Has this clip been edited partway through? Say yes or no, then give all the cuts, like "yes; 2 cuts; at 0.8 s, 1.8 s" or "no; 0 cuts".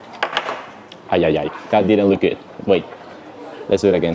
no; 0 cuts